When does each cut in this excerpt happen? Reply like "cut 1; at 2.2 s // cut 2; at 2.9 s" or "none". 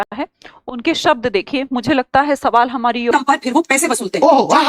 cut 1; at 3.1 s